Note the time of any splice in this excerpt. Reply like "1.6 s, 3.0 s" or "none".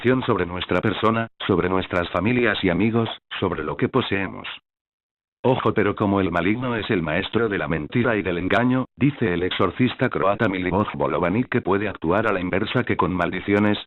8.8 s